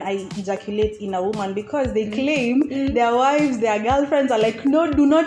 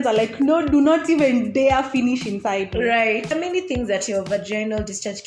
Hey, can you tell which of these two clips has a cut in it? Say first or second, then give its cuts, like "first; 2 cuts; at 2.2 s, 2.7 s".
second; 1 cut; at 3.3 s